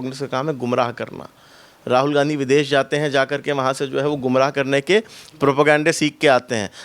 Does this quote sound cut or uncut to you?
uncut